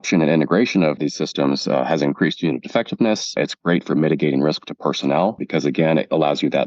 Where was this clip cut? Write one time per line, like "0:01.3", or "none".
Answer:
0:01.0
0:03.4
0:05.4